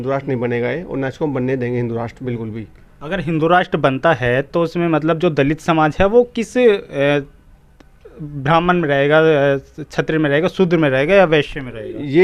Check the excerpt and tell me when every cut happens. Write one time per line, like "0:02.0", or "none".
none